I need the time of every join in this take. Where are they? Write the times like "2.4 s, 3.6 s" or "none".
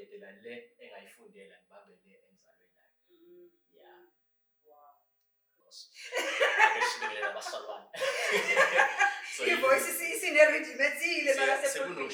5.5 s

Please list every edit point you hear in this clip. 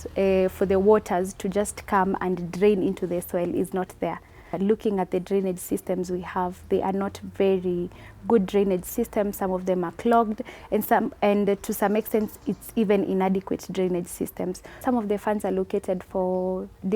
4.6 s, 14.7 s

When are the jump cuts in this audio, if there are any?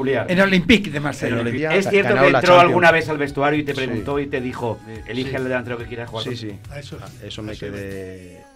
1.6 s, 4.9 s

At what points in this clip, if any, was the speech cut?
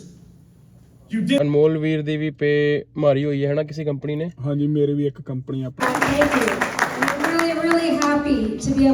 1.4 s, 5.8 s

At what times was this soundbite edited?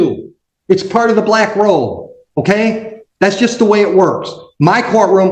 none

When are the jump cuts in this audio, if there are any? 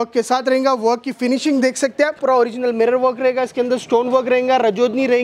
2.2 s

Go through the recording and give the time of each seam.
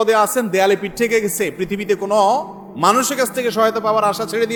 none

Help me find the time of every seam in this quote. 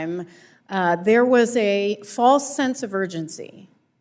none

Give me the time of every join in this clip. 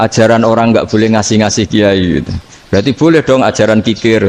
none

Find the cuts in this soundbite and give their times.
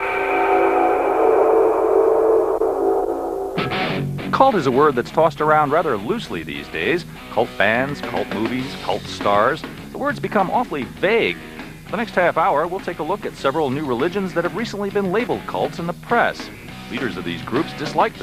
16.1 s

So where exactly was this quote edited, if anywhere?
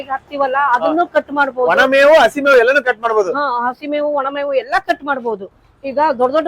5.5 s

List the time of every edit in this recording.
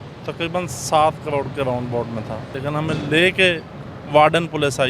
2.6 s

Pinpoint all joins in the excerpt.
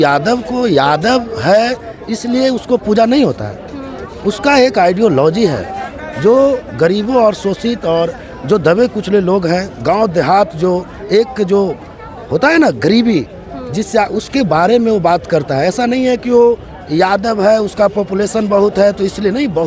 none

